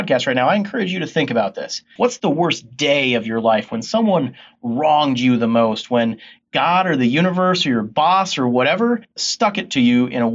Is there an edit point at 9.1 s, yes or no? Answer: yes